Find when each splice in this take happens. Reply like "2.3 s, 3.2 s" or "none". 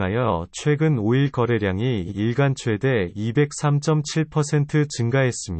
1.2 s